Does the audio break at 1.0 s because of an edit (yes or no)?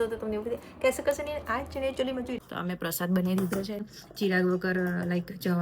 no